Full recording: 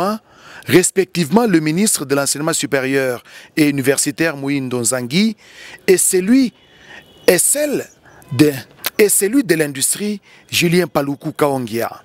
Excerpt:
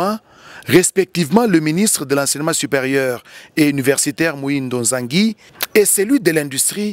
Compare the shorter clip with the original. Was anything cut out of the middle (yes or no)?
yes